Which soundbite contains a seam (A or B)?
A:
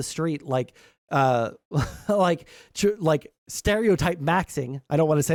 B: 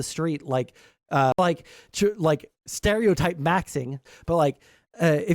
B